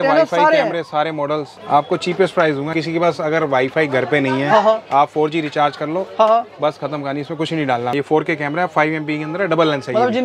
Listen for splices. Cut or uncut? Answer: cut